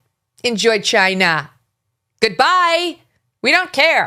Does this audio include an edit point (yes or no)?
no